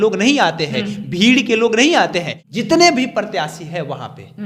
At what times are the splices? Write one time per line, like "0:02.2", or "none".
0:02.4